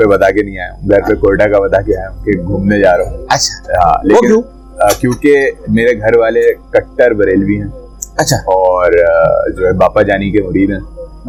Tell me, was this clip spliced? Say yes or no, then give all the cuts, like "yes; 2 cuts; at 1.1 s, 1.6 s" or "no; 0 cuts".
no; 0 cuts